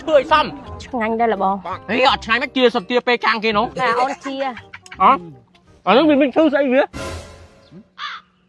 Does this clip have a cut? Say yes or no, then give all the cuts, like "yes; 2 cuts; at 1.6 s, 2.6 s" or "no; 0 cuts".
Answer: no; 0 cuts